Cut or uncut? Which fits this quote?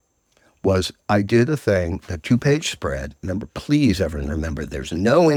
uncut